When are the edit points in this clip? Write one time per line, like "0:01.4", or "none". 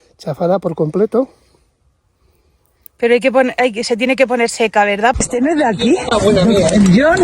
0:05.1